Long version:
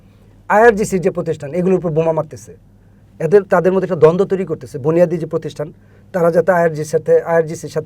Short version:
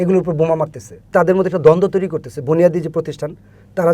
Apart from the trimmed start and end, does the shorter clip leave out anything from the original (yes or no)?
yes